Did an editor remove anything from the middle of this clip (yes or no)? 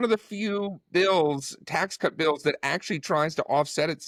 no